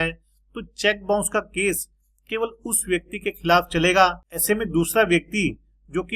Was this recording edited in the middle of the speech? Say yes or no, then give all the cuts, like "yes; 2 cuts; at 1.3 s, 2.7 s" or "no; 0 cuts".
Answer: yes; 1 cut; at 4.3 s